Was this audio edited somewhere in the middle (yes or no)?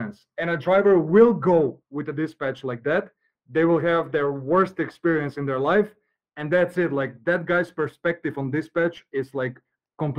no